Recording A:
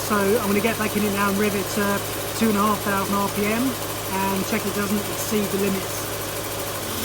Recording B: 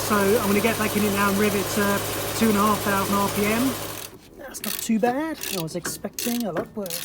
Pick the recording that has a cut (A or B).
B